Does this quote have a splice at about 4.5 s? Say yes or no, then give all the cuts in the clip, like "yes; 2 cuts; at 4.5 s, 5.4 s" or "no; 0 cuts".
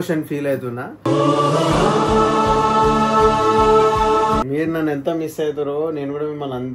yes; 1 cut; at 4.5 s